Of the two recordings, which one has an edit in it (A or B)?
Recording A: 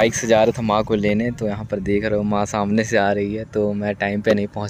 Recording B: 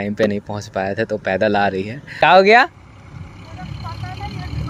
B